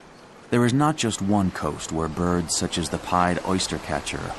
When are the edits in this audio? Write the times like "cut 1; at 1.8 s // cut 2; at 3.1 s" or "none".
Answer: none